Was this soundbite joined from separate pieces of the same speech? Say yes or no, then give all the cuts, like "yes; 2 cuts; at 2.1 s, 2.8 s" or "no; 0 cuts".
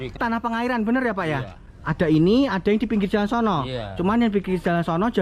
no; 0 cuts